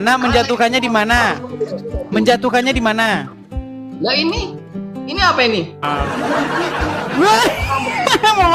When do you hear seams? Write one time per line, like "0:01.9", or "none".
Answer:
0:05.8